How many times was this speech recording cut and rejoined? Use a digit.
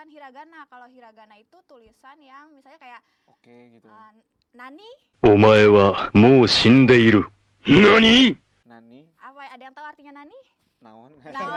0